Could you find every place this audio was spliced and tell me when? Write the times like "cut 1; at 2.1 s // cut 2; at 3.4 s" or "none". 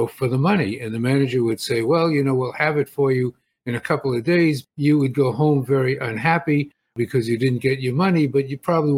cut 1; at 4.7 s